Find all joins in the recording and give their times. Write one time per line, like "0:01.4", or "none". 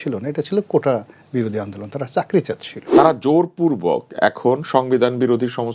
0:02.7